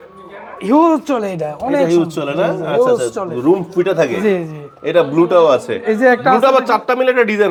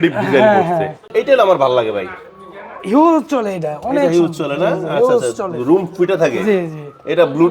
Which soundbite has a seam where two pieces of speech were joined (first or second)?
second